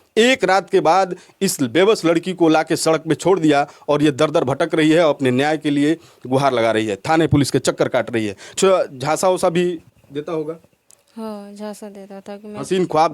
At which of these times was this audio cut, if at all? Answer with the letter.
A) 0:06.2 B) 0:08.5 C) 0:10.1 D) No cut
B